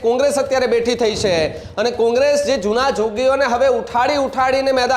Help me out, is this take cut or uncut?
uncut